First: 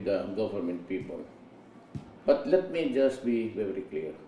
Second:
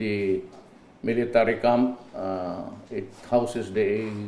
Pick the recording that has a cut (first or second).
first